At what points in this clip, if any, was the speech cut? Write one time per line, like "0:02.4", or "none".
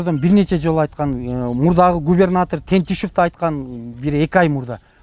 none